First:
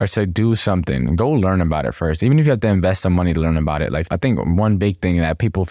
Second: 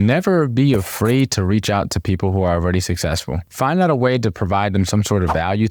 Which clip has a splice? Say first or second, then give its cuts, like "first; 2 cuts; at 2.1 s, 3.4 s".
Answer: first; 1 cut; at 4.1 s